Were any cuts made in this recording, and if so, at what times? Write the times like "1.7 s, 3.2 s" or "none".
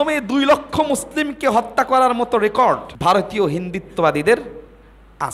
2.9 s